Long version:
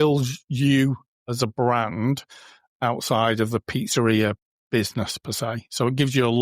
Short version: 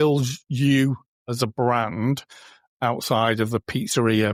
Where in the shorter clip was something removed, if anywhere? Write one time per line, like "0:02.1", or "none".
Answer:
none